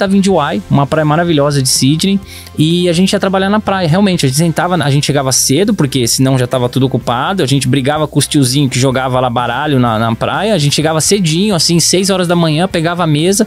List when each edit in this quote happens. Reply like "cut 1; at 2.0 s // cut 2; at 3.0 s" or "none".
none